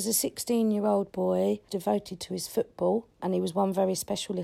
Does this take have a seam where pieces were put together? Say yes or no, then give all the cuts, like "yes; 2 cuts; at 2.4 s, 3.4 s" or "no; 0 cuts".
yes; 2 cuts; at 1.7 s, 3.2 s